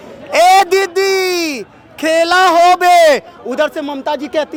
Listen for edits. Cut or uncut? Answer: uncut